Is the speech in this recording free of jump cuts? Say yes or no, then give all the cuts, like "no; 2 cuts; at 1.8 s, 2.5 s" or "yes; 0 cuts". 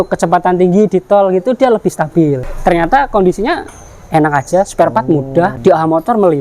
no; 2 cuts; at 2.4 s, 5.6 s